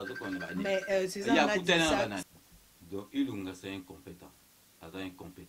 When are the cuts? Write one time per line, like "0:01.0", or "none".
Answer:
0:02.2